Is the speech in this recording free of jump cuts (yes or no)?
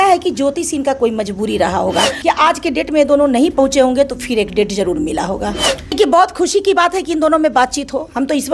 no